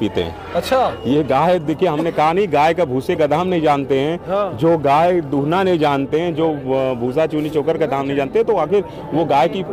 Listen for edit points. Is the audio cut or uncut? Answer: uncut